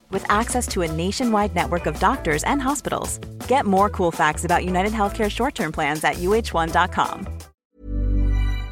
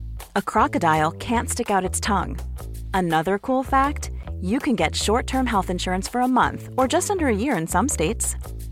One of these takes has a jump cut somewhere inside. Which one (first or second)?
first